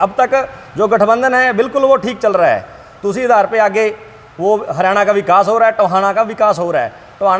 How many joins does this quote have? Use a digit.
0